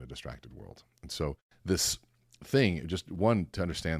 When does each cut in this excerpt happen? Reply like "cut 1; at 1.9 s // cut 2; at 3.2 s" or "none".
cut 1; at 1.5 s